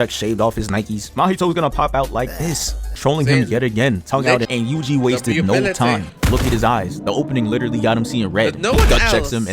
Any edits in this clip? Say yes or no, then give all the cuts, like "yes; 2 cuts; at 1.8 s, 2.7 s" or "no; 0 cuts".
yes; 1 cut; at 4.4 s